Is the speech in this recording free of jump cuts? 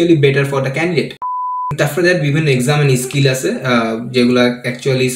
no; 1 cut; at 1.6 s

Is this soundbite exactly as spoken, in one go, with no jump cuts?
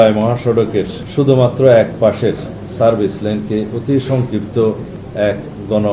yes; 0 cuts

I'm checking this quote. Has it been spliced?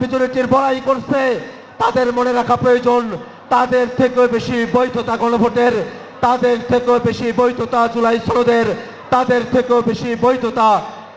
no; 0 cuts

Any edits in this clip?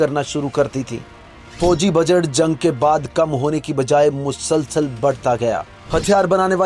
yes; 2 cuts; at 1.5 s, 5.8 s

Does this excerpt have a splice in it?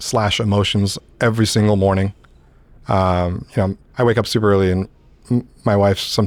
no; 0 cuts

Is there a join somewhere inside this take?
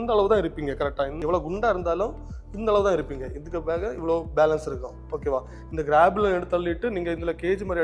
no; 0 cuts

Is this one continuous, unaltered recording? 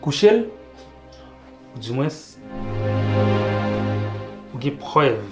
yes; 0 cuts

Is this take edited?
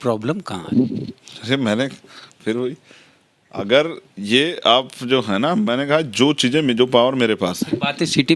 no; 0 cuts

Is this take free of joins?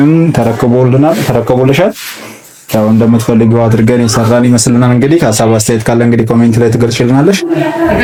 yes; 0 cuts

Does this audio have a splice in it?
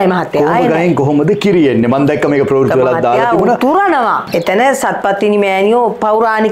no; 0 cuts

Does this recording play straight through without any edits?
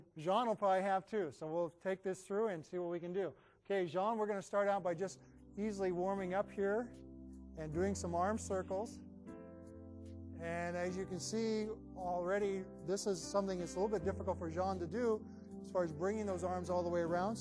yes; 0 cuts

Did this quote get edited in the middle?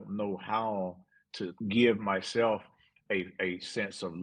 yes; 1 cut; at 1.5 s

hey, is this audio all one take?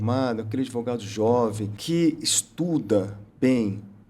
no; 1 cut; at 1.7 s

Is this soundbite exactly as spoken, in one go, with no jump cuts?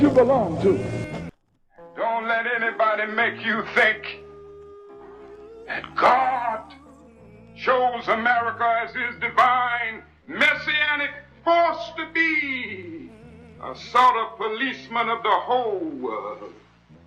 no; 1 cut; at 1.3 s

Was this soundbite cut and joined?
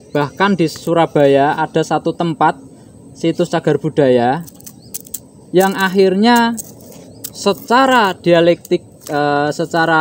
no; 0 cuts

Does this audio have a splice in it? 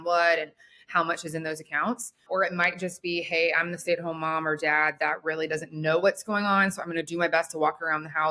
yes; 1 cut; at 2.2 s

